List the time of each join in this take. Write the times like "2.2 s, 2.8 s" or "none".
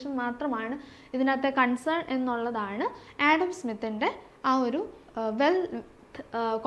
none